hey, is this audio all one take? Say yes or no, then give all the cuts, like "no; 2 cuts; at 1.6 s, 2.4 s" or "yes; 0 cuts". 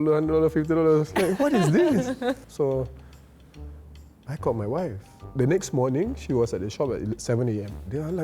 yes; 0 cuts